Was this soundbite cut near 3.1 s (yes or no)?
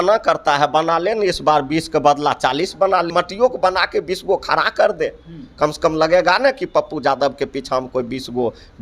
yes